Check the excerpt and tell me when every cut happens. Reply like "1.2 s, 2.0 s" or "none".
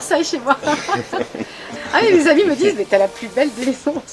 1.8 s